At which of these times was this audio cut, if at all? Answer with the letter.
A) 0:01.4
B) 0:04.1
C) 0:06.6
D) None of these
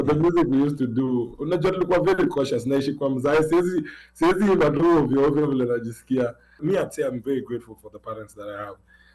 C